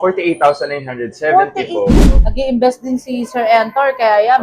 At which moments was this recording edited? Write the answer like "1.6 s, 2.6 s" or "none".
2.0 s